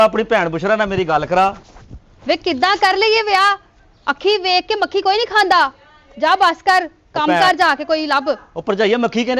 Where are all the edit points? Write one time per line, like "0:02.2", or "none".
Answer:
none

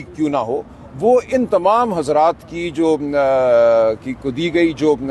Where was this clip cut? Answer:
none

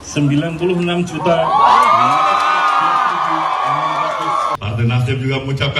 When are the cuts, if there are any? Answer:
0:04.5

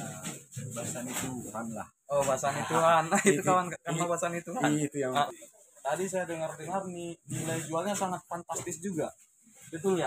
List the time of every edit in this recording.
0:05.3

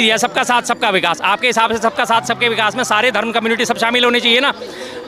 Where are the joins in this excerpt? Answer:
none

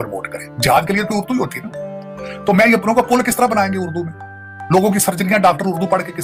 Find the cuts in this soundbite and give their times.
none

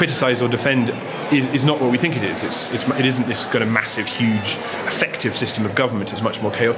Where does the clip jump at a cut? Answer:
0:01.1
0:04.7

